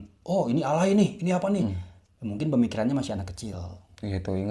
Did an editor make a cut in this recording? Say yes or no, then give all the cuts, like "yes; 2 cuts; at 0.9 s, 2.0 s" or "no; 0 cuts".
no; 0 cuts